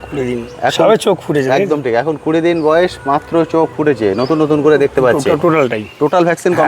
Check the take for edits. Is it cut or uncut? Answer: cut